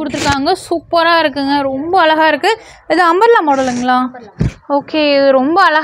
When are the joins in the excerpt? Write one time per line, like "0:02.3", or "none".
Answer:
none